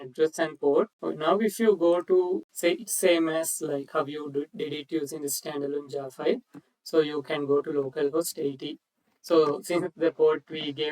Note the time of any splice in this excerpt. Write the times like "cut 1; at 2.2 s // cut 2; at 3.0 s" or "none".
cut 1; at 1.0 s // cut 2; at 2.5 s